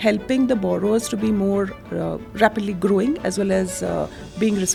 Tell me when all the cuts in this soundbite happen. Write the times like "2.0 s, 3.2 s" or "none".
none